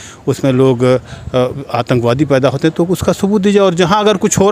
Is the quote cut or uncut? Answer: uncut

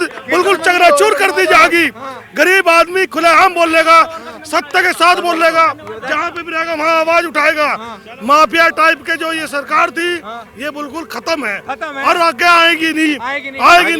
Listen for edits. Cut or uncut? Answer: uncut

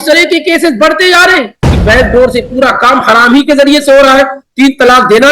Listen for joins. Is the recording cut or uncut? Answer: cut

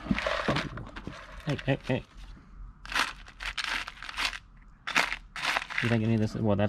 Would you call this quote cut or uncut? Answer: uncut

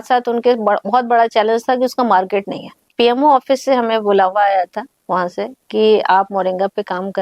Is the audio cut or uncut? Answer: cut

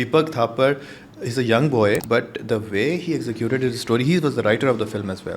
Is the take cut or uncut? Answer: cut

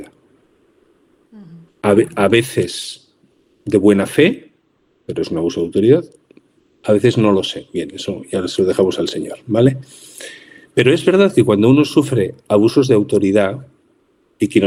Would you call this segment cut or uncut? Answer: uncut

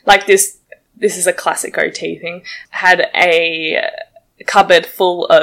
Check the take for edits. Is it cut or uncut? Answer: uncut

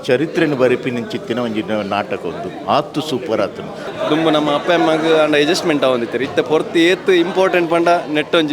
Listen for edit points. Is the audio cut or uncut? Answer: cut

